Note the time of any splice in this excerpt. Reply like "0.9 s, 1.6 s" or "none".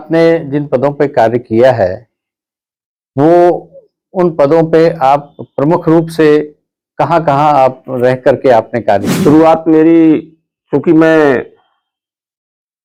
none